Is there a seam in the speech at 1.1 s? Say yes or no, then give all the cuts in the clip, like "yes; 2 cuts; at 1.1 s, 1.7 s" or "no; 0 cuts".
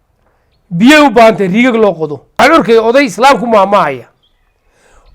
no; 1 cut; at 2.4 s